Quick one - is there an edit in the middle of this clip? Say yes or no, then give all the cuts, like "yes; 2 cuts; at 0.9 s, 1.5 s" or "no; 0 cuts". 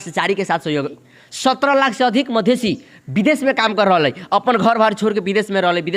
yes; 1 cut; at 1.0 s